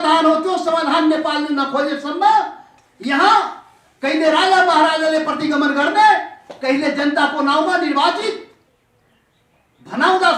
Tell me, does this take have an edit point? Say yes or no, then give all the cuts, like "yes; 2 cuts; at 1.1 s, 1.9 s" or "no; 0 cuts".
no; 0 cuts